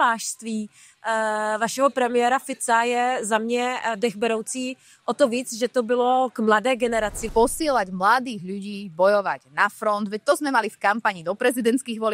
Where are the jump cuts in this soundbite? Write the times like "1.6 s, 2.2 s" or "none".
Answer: 7.2 s